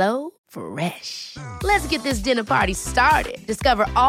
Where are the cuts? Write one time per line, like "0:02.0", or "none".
none

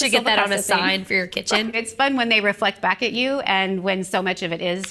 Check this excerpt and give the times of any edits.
0:01.9

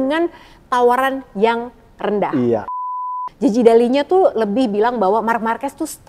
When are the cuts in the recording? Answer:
0:03.1

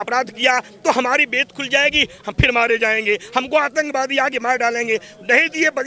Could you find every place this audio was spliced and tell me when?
none

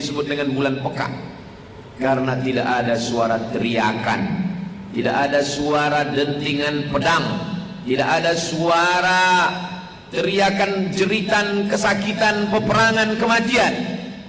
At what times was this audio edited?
none

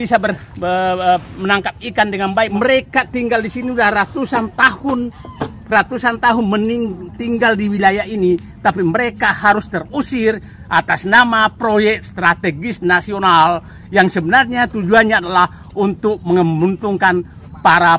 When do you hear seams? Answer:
0:02.5

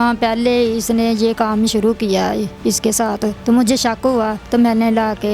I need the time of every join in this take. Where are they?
0:03.4
0:04.4

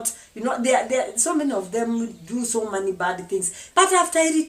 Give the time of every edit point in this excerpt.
0:03.6

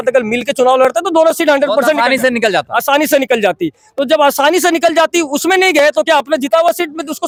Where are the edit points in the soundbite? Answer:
none

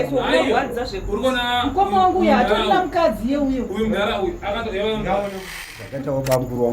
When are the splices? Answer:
0:05.7

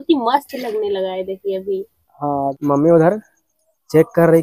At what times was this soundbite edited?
0:02.5

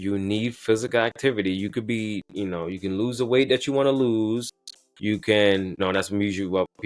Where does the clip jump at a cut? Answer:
0:05.8

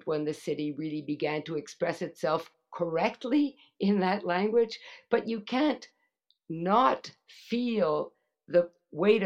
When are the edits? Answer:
none

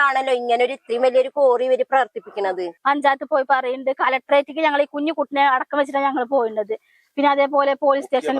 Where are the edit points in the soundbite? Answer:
0:02.7

